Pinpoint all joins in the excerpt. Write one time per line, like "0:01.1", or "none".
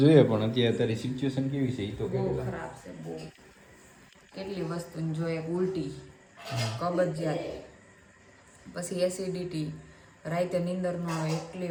none